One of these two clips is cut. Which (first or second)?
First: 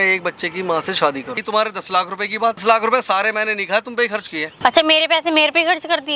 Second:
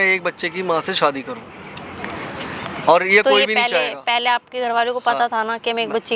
first